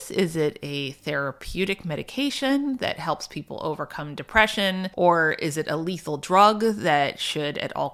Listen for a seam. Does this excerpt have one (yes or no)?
no